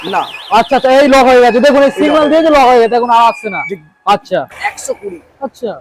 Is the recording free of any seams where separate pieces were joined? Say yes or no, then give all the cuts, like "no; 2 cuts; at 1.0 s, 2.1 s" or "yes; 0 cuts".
no; 1 cut; at 4.5 s